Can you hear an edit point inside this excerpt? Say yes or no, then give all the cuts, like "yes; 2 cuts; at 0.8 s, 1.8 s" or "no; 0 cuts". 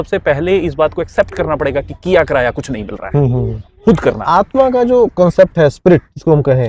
yes; 1 cut; at 4.2 s